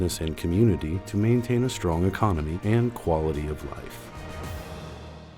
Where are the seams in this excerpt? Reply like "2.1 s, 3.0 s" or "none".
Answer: 3.7 s